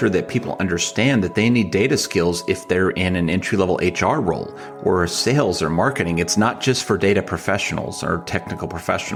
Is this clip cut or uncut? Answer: uncut